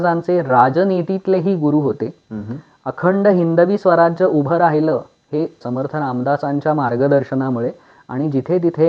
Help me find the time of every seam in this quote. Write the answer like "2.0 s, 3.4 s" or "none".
5.6 s